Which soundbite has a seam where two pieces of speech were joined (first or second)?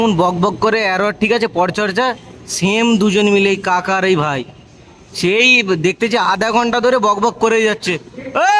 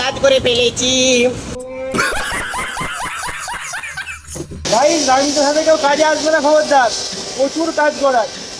second